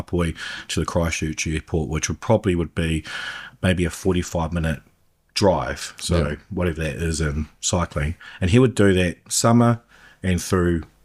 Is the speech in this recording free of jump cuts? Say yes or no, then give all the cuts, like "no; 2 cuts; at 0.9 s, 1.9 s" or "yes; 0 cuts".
yes; 0 cuts